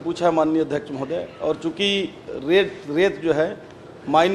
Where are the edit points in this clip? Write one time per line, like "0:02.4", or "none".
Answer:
none

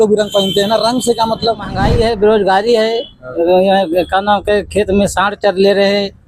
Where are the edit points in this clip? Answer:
0:01.8

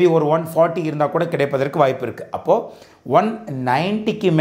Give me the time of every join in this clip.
none

